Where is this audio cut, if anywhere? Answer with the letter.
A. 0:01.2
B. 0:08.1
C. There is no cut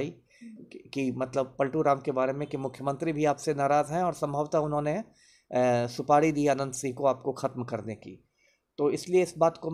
C